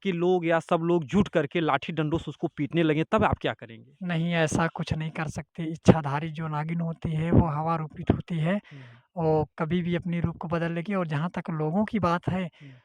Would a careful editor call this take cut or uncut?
uncut